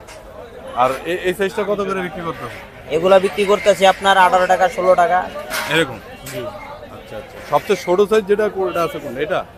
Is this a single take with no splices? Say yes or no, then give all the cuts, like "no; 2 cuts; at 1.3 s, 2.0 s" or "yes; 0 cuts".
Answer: yes; 0 cuts